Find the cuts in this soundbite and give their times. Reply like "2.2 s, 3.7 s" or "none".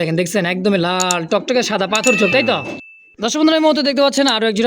2.7 s